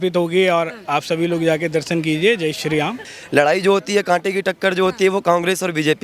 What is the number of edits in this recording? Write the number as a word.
one